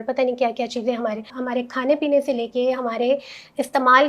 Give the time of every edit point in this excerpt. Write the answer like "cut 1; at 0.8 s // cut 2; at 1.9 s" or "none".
cut 1; at 1.3 s